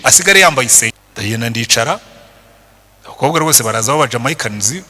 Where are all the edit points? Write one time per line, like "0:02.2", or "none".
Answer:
0:01.0